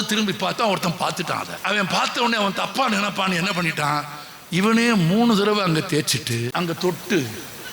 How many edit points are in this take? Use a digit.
2